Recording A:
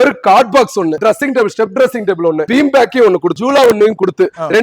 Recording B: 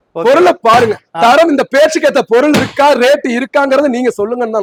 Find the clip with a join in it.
A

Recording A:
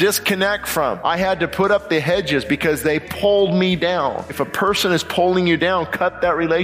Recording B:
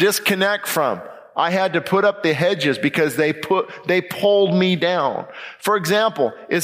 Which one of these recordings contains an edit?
A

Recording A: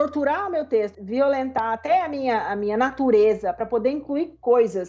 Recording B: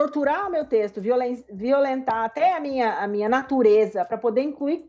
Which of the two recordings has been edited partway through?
A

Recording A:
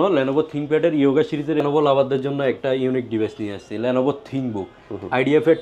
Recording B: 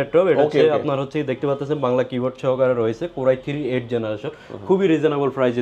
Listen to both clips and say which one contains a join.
A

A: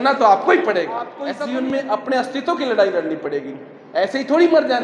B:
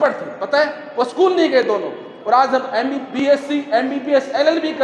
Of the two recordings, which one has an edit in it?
A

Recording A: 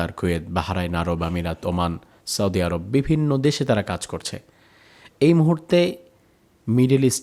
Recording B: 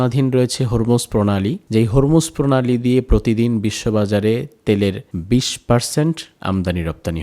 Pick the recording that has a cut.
B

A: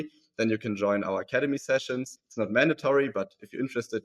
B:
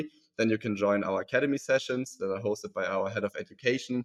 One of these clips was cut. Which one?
A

